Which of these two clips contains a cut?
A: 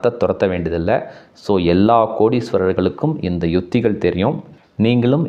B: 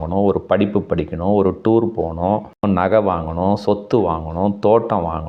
B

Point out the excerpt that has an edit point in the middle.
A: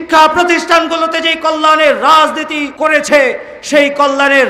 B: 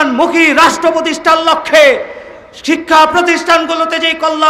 A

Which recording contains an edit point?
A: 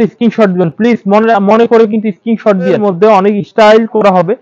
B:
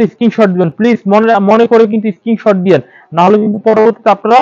A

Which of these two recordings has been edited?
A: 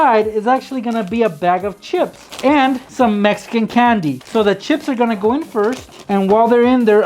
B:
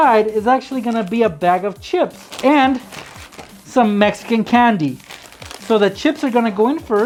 A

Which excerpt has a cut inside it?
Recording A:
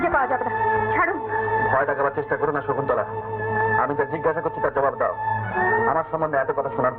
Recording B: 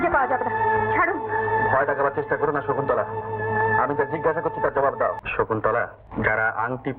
B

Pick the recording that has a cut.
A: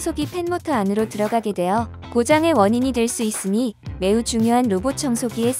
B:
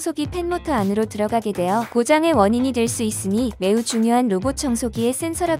B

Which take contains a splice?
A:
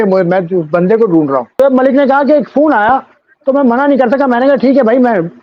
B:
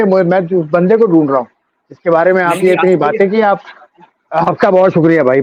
A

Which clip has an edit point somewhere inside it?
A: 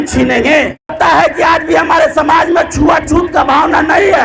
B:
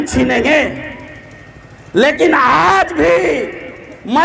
A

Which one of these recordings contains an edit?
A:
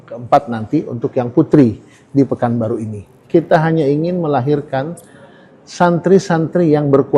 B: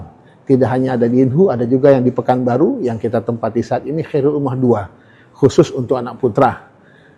A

